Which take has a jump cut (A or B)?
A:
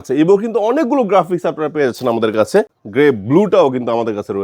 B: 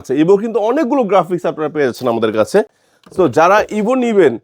A